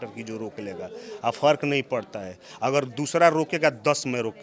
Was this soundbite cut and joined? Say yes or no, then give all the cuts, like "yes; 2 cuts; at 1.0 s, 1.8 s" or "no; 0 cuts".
no; 0 cuts